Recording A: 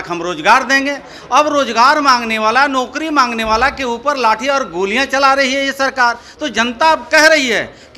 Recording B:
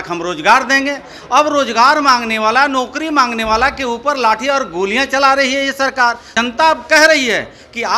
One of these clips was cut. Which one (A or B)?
B